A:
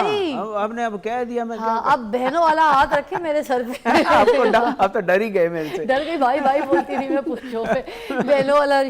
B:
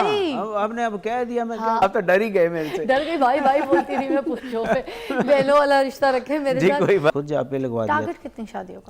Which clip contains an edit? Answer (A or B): B